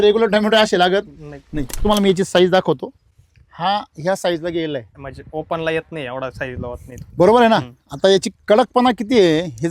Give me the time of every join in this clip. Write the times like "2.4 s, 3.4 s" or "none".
1.8 s, 5.0 s